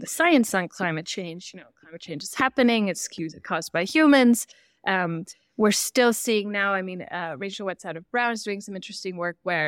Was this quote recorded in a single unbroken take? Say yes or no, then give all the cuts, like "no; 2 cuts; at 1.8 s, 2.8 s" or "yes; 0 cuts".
yes; 0 cuts